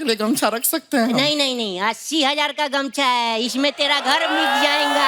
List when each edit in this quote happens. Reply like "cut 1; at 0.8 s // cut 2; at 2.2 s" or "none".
none